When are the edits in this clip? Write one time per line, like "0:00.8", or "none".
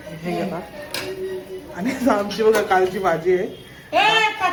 none